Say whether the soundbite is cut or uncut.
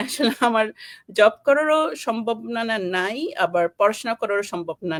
uncut